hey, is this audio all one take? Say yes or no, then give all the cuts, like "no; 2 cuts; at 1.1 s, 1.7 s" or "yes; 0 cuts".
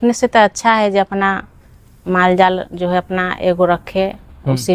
yes; 0 cuts